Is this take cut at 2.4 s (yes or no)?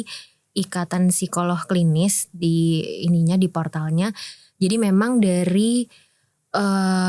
no